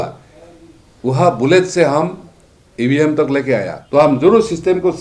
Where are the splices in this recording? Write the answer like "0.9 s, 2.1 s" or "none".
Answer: 3.8 s